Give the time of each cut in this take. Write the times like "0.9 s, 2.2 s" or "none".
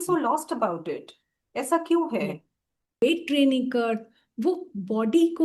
3.0 s

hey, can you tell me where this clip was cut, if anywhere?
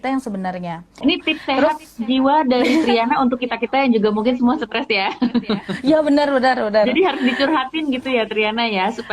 0.9 s

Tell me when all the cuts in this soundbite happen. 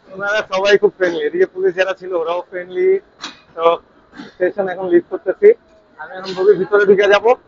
none

